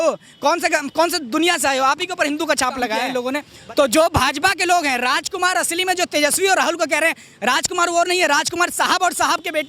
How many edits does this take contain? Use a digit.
1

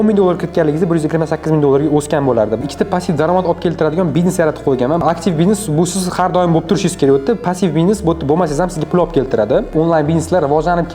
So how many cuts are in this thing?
3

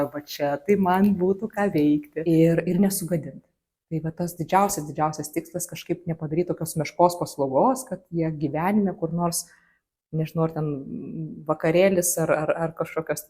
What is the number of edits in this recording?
1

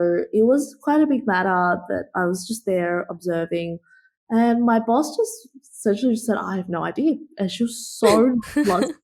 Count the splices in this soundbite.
0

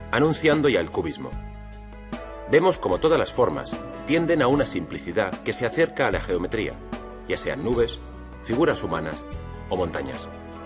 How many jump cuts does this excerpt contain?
0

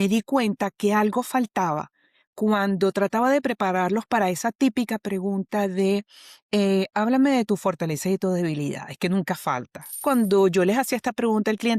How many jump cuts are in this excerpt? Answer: 1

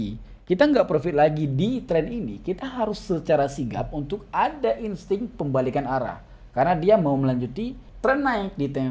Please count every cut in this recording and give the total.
1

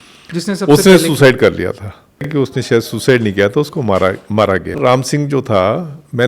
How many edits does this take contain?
2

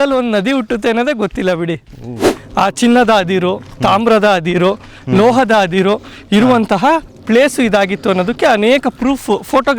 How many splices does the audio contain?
1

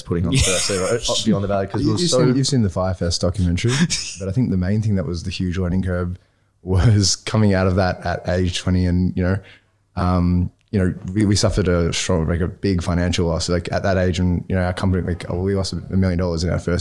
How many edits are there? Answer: 1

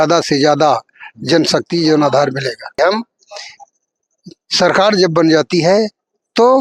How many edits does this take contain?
1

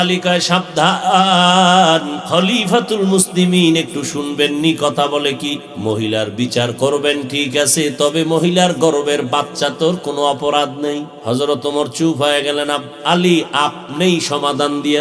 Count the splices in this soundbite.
3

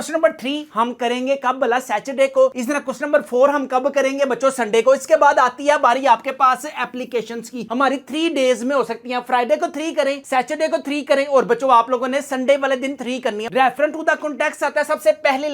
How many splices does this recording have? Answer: 2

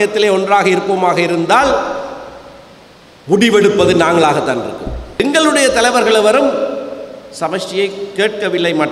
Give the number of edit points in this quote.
1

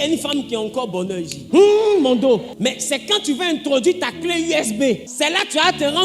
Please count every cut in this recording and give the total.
3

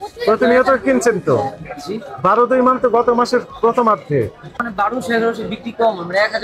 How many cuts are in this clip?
1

